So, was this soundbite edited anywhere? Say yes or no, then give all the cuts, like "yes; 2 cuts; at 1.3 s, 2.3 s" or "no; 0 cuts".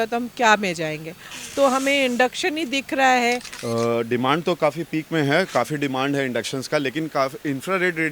yes; 1 cut; at 3.5 s